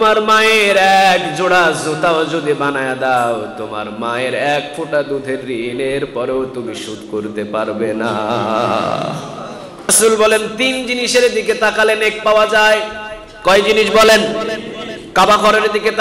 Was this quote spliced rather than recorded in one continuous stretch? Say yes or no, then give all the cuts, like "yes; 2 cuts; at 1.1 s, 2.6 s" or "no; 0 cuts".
yes; 1 cut; at 9.9 s